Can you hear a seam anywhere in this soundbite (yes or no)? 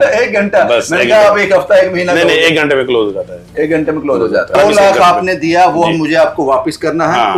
yes